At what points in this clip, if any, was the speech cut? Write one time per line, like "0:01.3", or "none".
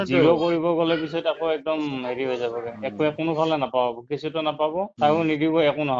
0:04.9